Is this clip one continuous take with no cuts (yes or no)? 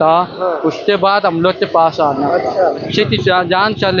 no